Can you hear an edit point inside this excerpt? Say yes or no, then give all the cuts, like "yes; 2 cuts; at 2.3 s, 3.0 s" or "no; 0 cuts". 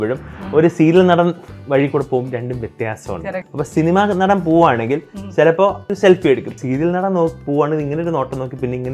yes; 2 cuts; at 3.5 s, 5.9 s